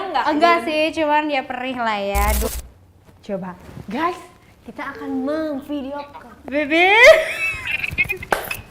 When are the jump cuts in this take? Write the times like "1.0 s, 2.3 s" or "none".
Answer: 2.5 s

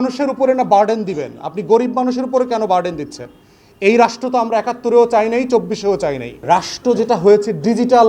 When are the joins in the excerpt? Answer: 6.4 s

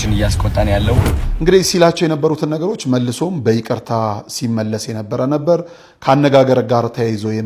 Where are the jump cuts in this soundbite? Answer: 1.2 s

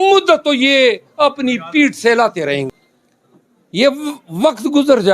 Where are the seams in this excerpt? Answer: 2.7 s

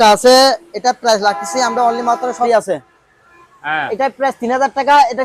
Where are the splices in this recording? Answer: 2.5 s

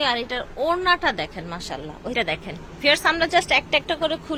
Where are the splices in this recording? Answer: none

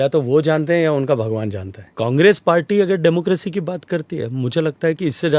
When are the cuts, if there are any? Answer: 1.9 s

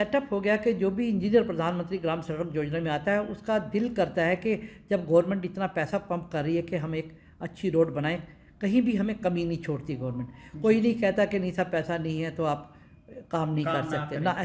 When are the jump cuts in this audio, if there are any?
none

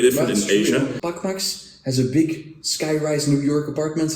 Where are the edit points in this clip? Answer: 1.0 s

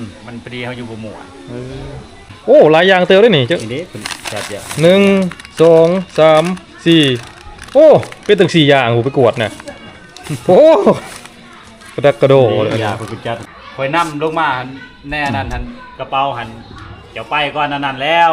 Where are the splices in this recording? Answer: 2.2 s, 13.5 s

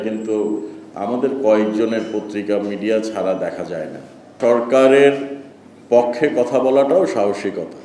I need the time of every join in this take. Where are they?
4.3 s

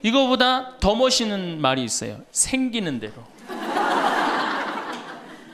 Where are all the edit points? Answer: none

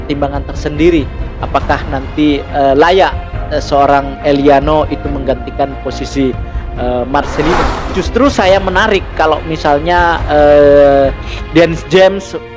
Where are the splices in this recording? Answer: 7.8 s

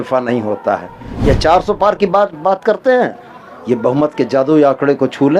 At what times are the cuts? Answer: 1.1 s

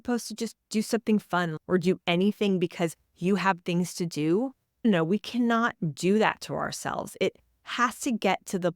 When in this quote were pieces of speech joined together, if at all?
1.6 s

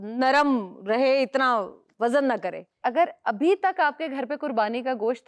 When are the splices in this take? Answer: 2.8 s

